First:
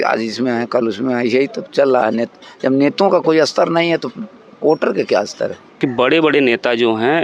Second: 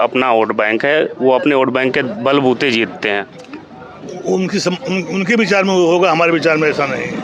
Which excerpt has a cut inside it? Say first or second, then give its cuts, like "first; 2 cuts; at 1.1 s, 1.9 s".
first; 1 cut; at 5.8 s